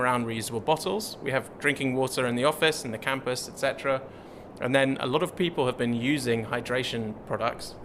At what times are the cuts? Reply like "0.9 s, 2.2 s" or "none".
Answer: none